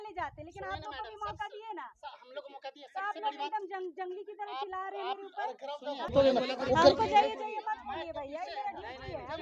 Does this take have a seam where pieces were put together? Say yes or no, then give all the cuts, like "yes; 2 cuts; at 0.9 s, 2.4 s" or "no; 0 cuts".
yes; 1 cut; at 6.1 s